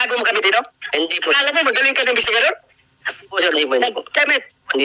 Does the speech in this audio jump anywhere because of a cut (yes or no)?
no